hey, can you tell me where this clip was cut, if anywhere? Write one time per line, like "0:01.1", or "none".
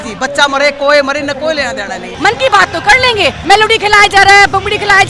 0:02.1
0:03.4